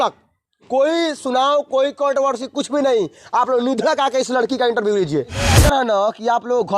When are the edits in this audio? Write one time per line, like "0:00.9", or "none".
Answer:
0:05.6